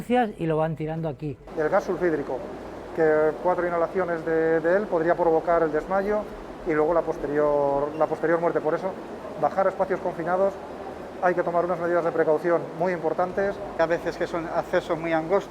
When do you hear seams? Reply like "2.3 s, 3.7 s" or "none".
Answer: 1.5 s, 13.7 s